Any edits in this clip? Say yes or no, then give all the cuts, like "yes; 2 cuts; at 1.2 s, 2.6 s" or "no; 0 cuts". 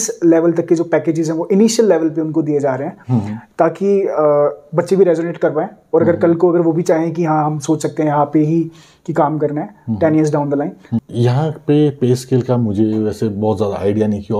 no; 0 cuts